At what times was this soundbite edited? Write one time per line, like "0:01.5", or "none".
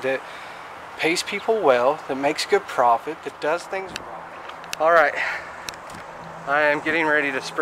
0:03.7